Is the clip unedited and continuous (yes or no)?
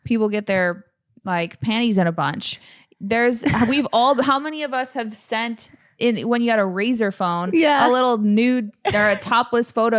yes